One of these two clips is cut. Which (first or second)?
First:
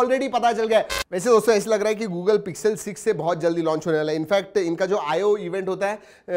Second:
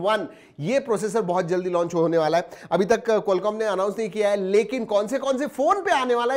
first